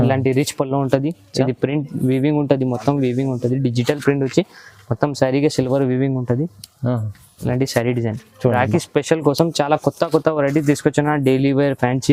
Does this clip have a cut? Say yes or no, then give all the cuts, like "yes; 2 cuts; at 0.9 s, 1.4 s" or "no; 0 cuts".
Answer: no; 0 cuts